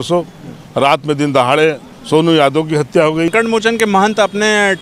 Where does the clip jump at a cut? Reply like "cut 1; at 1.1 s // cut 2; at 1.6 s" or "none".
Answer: cut 1; at 3.3 s